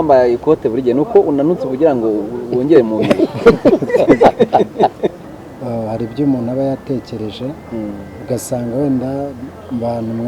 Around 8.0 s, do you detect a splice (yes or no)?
no